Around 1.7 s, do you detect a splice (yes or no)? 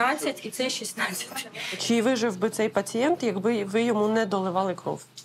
yes